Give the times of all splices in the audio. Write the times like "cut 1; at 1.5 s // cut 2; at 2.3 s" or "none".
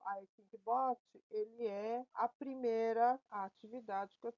cut 1; at 2.1 s // cut 2; at 3.3 s